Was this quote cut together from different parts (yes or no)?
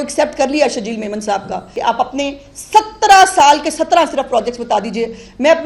yes